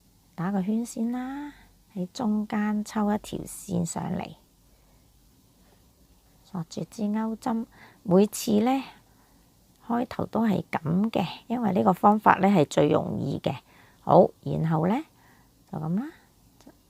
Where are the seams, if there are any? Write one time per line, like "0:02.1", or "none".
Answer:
none